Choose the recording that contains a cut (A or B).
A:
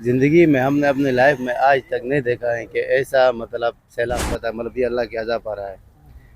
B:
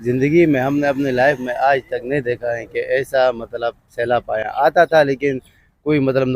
A